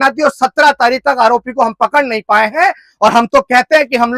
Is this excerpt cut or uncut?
uncut